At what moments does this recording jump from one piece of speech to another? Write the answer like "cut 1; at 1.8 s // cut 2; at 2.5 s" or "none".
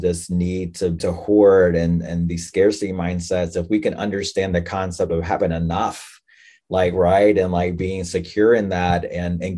cut 1; at 1.0 s